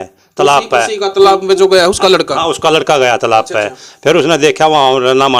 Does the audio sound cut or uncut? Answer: uncut